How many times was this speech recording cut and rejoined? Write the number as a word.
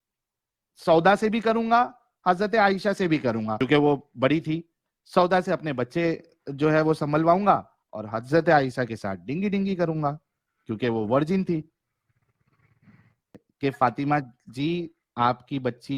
two